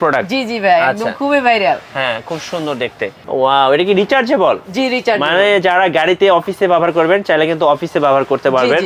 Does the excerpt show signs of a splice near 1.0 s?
no; 1 cut; at 3.2 s

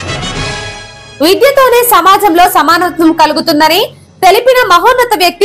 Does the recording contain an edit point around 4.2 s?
no; 1 cut; at 1.0 s

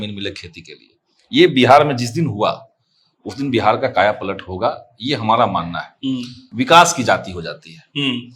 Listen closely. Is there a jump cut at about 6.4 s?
yes; 1 cut; at 6.4 s

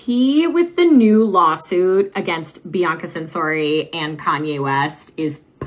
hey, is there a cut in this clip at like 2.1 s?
no; 0 cuts

